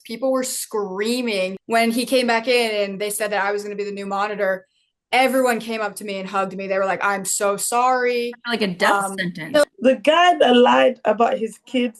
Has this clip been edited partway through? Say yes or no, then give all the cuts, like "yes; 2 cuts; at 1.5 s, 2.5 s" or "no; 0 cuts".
yes; 2 cuts; at 1.6 s, 9.6 s